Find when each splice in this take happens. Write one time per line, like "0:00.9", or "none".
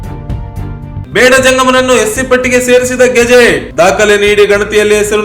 0:01.0